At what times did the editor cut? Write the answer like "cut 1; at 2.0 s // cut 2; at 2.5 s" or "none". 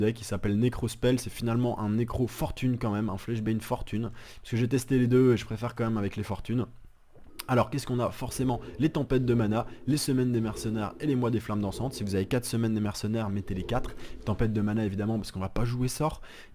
cut 1; at 8.7 s